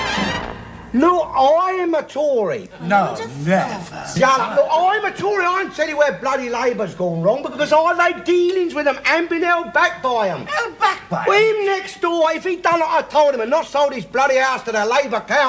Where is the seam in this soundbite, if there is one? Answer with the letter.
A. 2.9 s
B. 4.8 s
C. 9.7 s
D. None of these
D